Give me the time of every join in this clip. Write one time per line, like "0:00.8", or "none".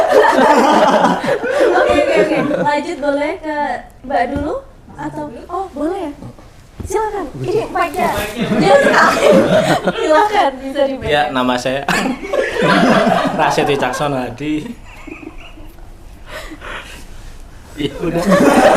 none